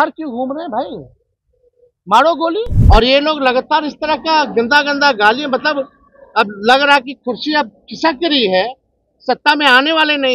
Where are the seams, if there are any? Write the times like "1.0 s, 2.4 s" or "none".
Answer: 2.8 s